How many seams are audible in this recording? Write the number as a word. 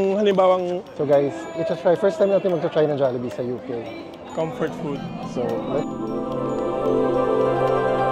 two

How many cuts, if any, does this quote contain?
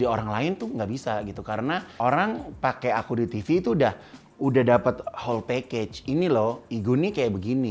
one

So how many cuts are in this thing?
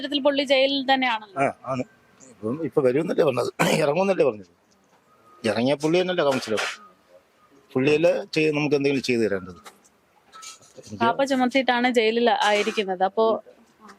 zero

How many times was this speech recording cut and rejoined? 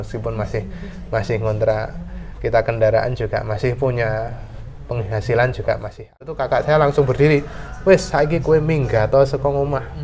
one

